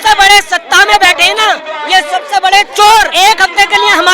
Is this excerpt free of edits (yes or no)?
no